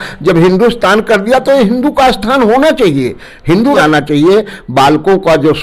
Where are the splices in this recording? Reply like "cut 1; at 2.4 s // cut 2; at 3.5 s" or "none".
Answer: cut 1; at 3.8 s